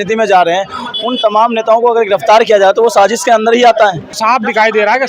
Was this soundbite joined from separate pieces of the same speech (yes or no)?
yes